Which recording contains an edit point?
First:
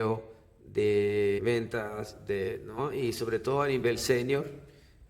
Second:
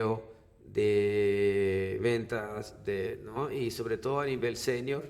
first; 1 cut; at 1.4 s

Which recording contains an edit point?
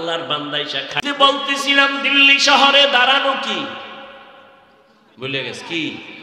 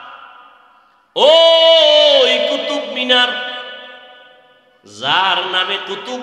first; 1 cut; at 1.0 s

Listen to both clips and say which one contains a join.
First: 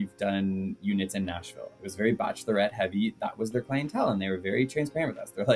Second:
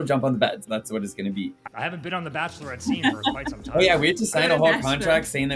second; 1 cut; at 1.7 s

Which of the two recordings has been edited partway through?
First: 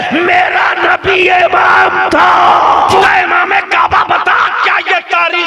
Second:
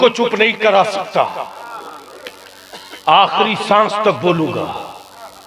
first; 1 cut; at 3.0 s

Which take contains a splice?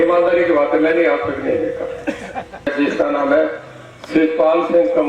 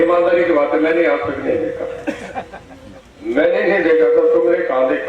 first; 1 cut; at 2.7 s

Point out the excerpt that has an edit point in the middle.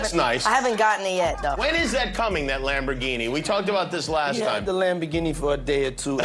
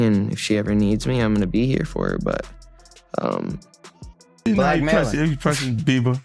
second; 1 cut; at 4.3 s

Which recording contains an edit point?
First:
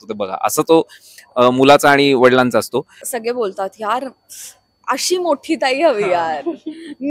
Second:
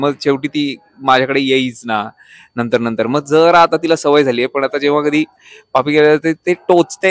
first; 1 cut; at 3.0 s

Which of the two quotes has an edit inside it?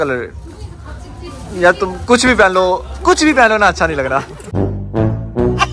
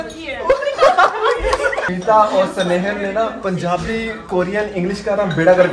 second; 3 cuts; at 1.8 s, 3.4 s, 4.2 s

